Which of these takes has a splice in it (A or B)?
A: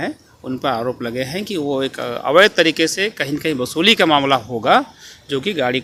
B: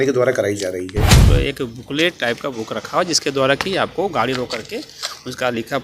B